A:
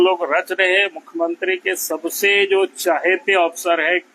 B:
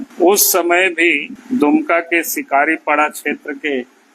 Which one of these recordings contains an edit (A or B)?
B